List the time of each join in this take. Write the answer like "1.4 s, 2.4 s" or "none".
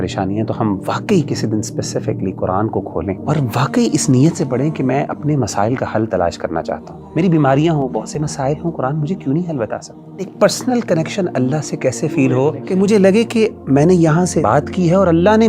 3.2 s, 6.9 s, 10.3 s, 12.6 s, 14.4 s